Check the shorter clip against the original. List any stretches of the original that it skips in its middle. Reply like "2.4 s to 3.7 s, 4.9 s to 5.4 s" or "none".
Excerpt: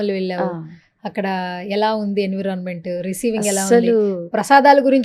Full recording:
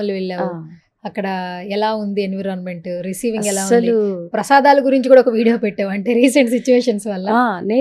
none